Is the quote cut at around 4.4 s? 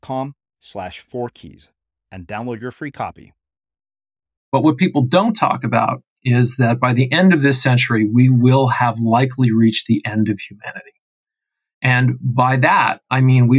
yes; 1 cut; at 4.4 s

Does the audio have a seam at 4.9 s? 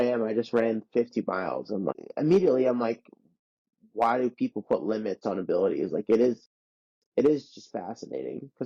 no; 1 cut; at 1.9 s

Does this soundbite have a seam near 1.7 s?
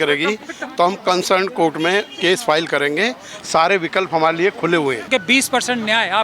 no; 1 cut; at 5.1 s

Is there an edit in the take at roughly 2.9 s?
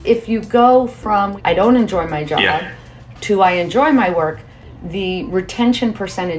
no; 1 cut; at 1.3 s

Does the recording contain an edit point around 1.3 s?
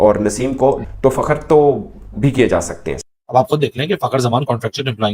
no; 1 cut; at 3.0 s

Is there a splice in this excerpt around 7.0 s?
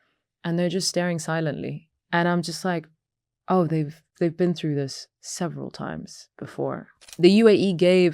yes; 2 cuts; at 1.9 s, 7.0 s

